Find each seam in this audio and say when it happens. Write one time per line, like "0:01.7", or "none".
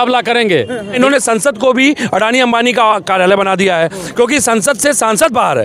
0:00.9